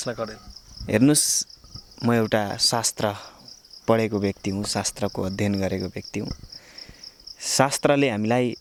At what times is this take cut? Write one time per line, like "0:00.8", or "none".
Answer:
none